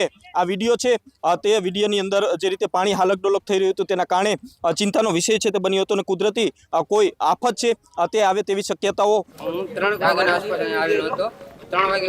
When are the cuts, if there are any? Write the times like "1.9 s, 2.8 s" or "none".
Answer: 9.3 s